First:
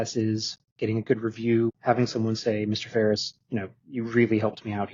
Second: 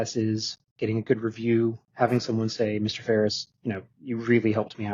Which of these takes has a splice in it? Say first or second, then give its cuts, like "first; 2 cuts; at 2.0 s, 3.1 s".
first; 1 cut; at 1.8 s